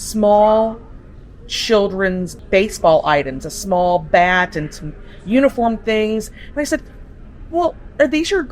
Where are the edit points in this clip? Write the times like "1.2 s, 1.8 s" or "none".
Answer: 2.4 s